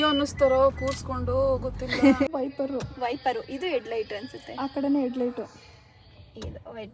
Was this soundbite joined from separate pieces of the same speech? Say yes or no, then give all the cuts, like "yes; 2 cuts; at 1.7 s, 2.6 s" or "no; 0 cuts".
yes; 1 cut; at 2.3 s